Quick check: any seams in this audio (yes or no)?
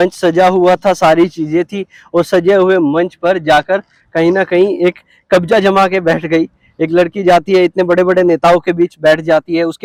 no